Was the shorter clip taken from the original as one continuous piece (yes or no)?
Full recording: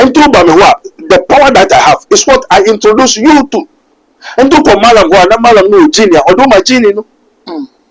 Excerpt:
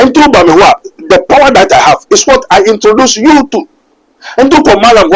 yes